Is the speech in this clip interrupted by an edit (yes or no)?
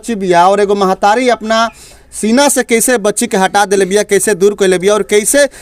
no